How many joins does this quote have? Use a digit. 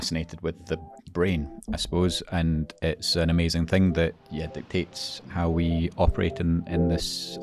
0